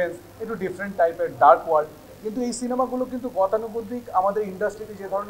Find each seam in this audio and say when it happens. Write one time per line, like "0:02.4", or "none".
none